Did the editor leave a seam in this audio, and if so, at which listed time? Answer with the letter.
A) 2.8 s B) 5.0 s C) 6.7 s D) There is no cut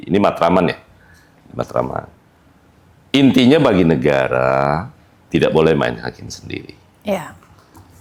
D